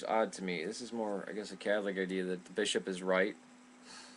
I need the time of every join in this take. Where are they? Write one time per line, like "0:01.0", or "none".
none